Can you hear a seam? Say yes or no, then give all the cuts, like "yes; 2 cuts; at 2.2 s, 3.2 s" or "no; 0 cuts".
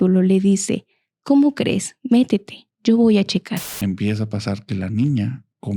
yes; 1 cut; at 3.7 s